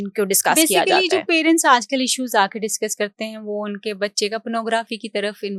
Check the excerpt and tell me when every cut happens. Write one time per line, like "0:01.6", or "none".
none